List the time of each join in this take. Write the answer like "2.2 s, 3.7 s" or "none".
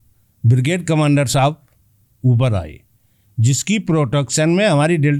none